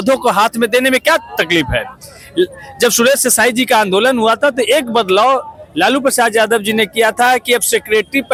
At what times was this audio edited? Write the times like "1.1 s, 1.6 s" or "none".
none